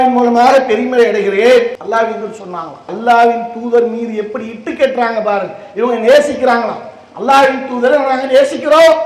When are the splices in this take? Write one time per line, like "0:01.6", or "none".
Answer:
0:01.8
0:02.9

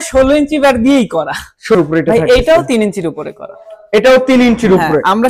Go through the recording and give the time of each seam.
0:01.8

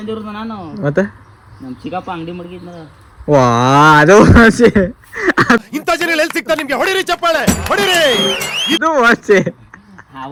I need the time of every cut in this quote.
none

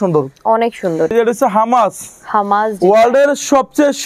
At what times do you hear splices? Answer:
0:01.1

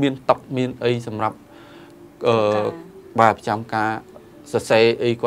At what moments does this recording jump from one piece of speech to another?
none

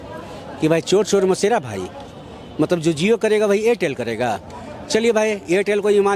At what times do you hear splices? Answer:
none

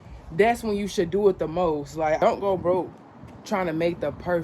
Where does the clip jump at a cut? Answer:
0:02.2

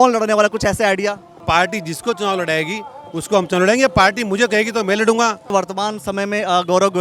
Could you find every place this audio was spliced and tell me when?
0:01.3
0:05.5

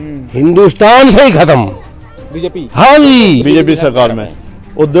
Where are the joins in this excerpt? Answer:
0:03.4

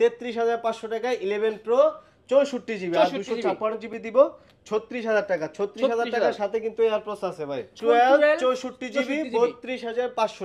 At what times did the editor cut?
0:07.8

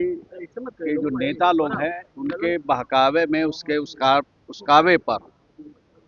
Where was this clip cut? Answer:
none

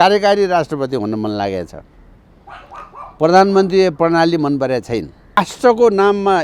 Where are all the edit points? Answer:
0:05.4

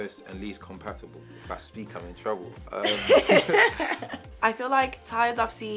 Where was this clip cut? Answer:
0:04.3

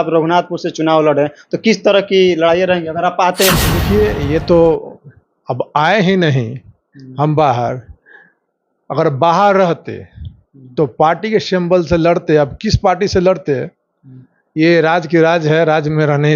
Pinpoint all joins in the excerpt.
0:03.7

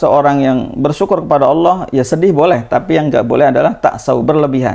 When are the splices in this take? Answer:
none

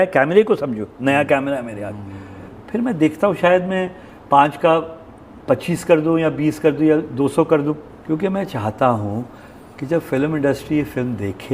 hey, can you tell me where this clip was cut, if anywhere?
0:02.5
0:07.9

